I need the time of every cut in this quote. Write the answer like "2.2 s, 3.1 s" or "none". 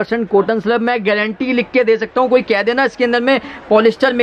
none